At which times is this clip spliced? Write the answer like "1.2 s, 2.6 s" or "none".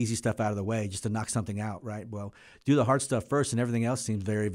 none